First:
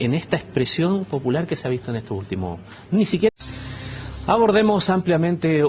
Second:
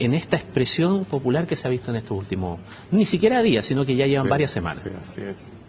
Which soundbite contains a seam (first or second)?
second